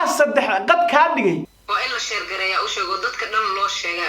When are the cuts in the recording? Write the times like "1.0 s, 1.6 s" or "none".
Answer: 1.5 s